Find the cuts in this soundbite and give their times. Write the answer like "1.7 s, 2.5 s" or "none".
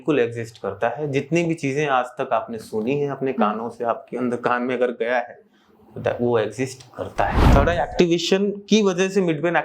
7.4 s

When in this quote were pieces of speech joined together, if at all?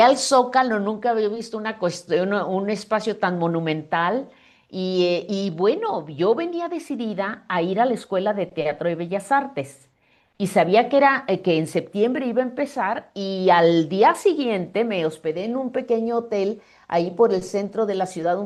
none

